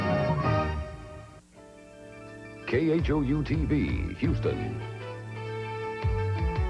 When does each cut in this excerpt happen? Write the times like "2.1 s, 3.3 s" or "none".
1.6 s